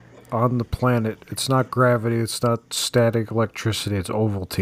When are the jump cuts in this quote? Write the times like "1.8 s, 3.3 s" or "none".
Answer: none